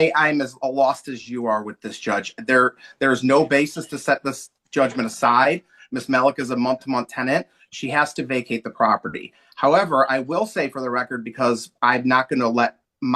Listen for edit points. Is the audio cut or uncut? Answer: uncut